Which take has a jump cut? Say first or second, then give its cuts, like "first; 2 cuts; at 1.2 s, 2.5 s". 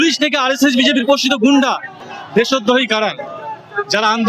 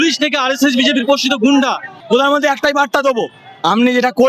second; 1 cut; at 1.9 s